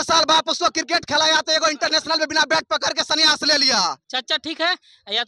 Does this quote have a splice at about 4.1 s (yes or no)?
yes